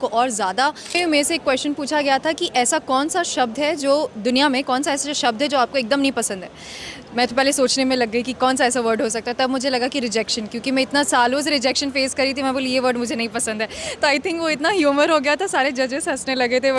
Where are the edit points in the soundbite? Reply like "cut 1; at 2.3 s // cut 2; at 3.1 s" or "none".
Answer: cut 1; at 1.0 s

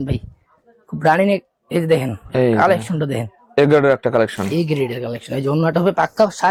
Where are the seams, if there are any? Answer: none

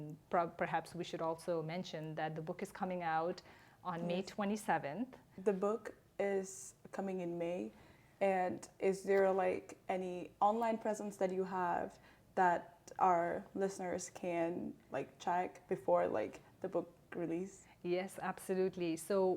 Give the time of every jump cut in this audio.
cut 1; at 5.2 s

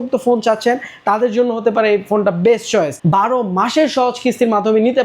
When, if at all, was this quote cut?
cut 1; at 3.0 s

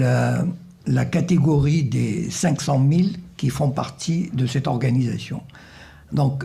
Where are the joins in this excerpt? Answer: cut 1; at 5.2 s

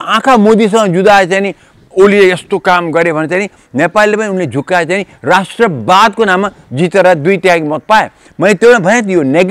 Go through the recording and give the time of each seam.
none

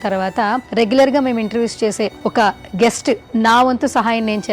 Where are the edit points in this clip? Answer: cut 1; at 2.2 s

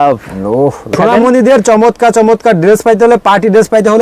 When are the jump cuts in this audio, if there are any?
cut 1; at 1.0 s

